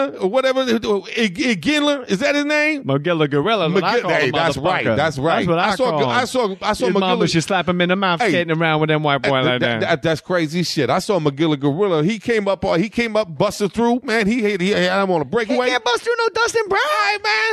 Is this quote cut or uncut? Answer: cut